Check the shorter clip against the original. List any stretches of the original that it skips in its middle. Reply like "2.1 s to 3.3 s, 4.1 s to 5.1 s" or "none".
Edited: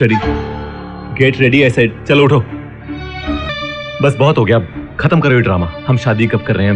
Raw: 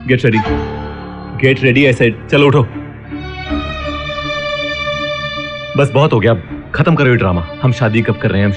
3.7 s to 5.3 s